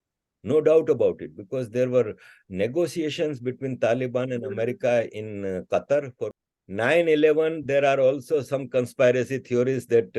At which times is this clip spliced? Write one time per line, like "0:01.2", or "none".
0:06.2